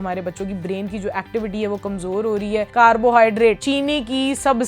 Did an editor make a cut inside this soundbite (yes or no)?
yes